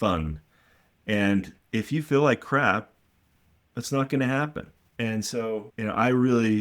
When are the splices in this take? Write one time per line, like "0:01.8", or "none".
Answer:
0:04.8
0:05.7

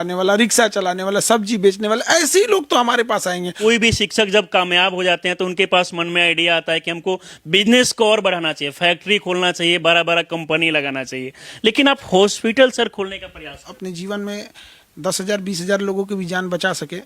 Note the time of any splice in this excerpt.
0:03.5
0:13.7

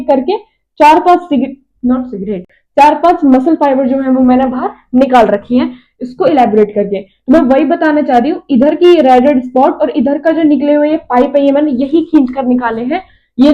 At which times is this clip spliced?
none

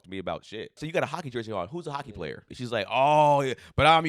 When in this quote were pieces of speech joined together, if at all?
0:00.8
0:02.6

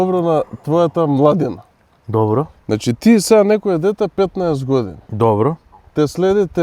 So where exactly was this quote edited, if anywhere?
none

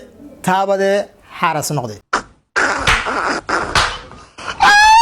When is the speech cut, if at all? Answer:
0:02.0

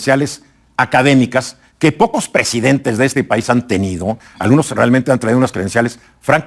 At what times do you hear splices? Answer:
none

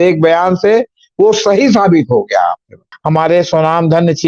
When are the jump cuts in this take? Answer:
0:02.9

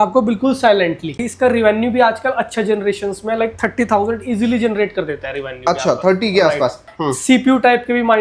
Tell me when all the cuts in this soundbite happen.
0:01.2
0:06.9

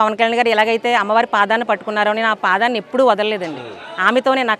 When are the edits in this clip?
none

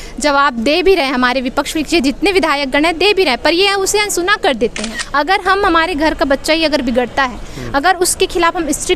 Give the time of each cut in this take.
0:05.0

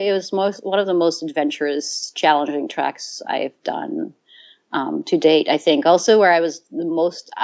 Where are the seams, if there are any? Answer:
none

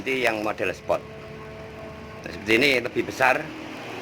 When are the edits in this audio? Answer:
0:01.5

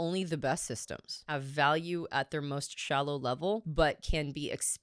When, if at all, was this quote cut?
0:01.2
0:03.7

